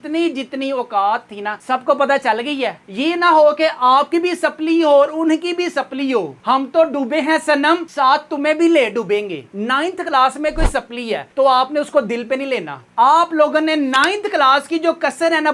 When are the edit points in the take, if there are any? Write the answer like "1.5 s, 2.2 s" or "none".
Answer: 2.8 s, 9.4 s, 12.8 s